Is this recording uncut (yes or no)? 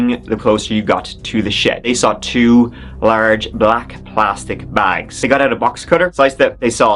no